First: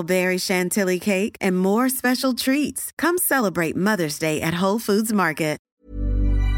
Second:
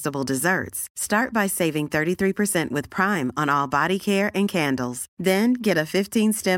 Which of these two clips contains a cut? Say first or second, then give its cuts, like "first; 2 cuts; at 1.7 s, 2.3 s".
first; 1 cut; at 5.7 s